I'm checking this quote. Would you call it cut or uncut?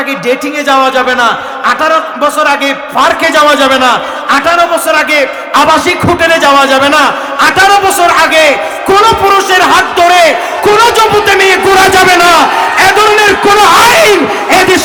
uncut